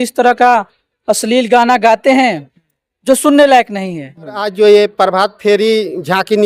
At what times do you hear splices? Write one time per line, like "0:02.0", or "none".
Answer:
0:04.4